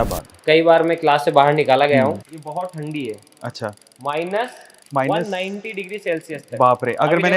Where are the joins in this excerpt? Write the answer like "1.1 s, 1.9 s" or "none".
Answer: 2.3 s